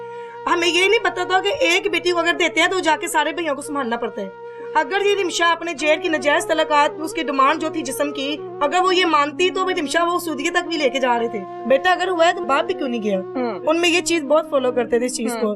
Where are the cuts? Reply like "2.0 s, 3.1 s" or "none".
11.5 s, 12.4 s